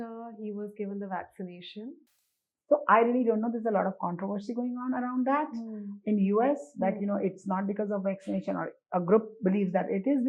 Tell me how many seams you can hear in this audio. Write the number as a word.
zero